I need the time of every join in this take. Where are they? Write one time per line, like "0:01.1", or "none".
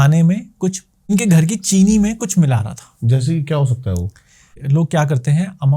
0:01.1
0:04.6